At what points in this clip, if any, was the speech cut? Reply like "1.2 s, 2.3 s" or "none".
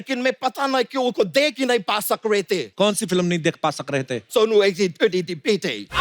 2.7 s, 4.2 s